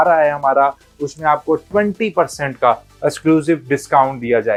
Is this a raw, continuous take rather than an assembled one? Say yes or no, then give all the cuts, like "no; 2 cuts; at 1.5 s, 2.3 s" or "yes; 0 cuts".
yes; 0 cuts